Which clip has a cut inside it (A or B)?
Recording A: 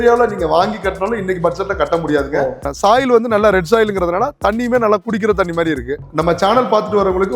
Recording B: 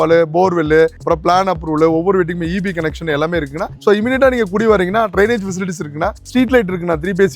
A